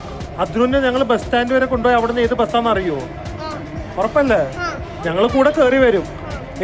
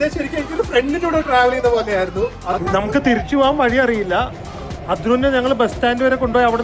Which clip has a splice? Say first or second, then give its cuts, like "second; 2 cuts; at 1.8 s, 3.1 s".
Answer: second; 1 cut; at 2.4 s